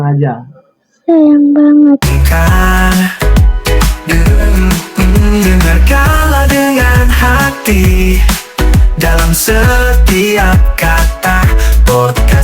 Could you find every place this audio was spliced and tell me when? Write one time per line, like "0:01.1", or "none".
0:02.1